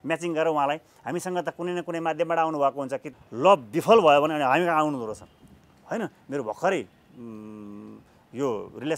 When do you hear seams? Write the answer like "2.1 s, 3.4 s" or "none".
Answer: 3.1 s